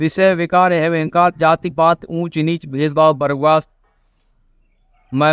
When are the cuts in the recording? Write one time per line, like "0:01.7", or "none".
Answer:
none